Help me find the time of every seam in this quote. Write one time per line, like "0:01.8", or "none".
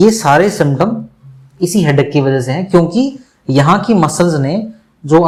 none